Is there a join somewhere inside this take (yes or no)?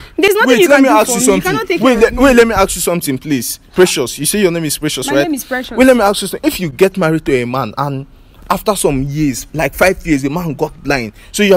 no